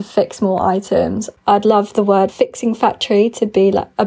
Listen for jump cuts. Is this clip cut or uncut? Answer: uncut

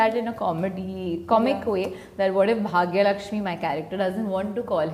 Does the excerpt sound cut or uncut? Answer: uncut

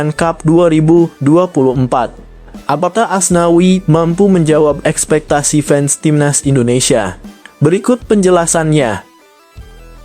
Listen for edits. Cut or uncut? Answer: cut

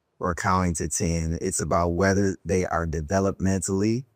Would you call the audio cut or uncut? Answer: uncut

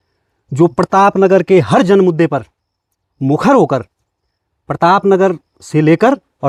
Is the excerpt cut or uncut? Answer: uncut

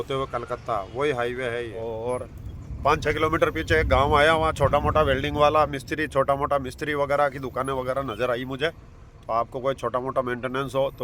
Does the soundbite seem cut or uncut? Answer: cut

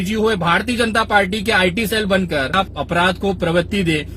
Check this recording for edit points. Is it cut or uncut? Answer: cut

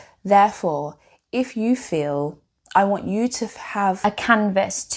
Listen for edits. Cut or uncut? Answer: cut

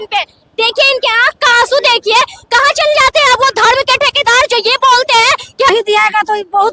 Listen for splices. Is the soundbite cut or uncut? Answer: cut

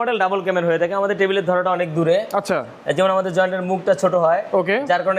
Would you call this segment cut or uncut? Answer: uncut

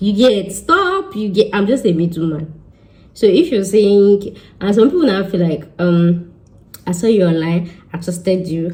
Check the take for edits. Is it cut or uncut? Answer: uncut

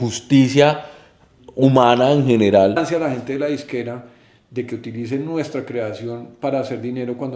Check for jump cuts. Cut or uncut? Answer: cut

